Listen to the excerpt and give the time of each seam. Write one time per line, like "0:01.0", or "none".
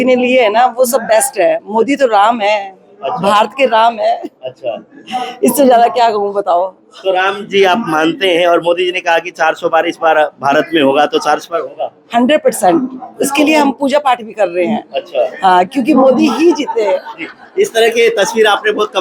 none